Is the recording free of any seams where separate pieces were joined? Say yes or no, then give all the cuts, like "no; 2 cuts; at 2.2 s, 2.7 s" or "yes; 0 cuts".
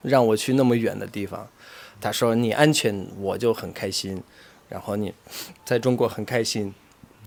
yes; 0 cuts